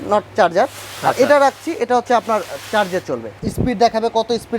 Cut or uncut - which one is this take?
cut